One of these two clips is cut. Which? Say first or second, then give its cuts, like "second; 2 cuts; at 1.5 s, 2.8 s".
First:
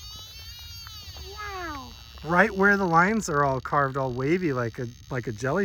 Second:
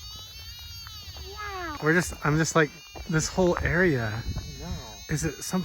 second; 1 cut; at 1.7 s